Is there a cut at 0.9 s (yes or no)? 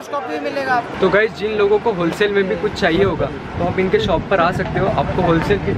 yes